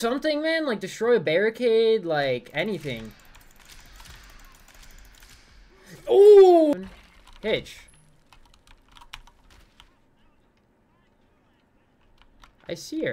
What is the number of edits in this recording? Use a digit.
1